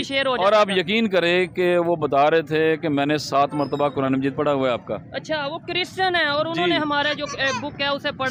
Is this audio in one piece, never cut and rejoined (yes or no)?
yes